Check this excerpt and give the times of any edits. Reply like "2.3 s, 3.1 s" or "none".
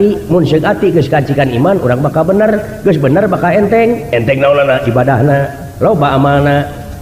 none